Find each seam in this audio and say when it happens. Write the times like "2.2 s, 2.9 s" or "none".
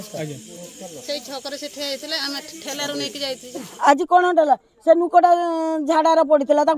3.7 s